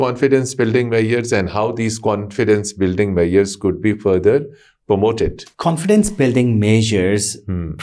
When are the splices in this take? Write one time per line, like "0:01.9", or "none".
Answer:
0:05.5